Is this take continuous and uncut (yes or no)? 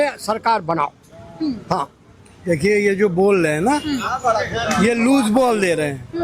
yes